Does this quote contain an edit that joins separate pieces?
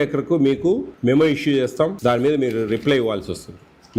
yes; 2 cuts; at 0.9 s, 2.0 s

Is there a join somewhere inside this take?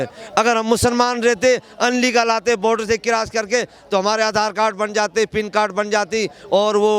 no; 0 cuts

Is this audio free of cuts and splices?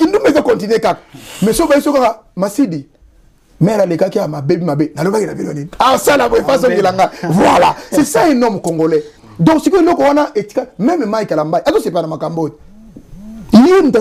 yes; 0 cuts

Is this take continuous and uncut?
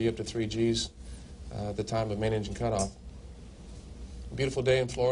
yes; 0 cuts

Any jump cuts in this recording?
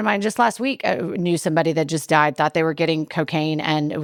no; 0 cuts

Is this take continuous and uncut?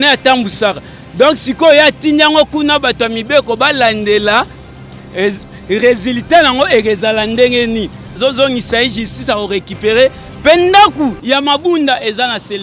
no; 1 cut; at 8.0 s

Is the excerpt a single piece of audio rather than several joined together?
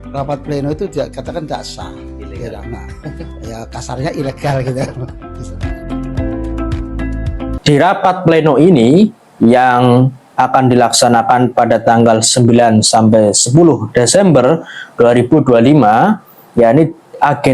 no; 1 cut; at 7.6 s

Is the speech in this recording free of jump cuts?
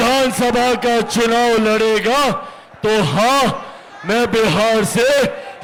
yes; 0 cuts

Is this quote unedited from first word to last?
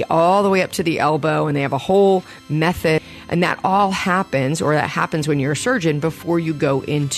no; 1 cut; at 3.0 s

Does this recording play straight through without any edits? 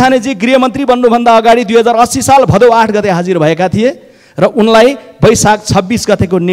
yes; 0 cuts

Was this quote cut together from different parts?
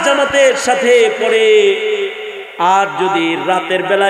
no; 0 cuts

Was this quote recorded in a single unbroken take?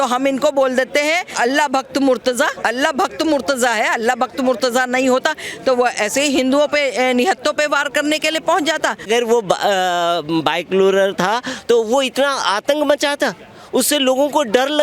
no; 3 cuts; at 1.3 s, 2.6 s, 9.0 s

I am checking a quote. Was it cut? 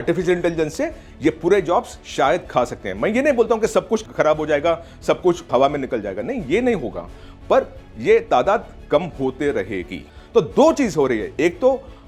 no; 0 cuts

